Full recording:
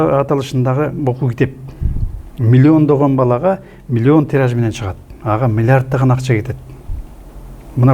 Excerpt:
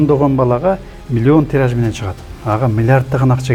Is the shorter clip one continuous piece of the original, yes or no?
yes